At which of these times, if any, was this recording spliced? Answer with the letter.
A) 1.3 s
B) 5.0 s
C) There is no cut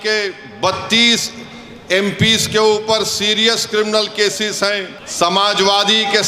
B